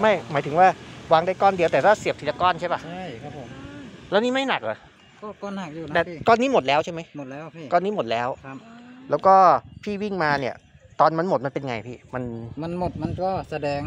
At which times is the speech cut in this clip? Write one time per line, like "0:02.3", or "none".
none